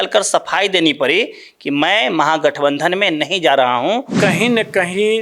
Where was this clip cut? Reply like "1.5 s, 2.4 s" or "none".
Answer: 4.1 s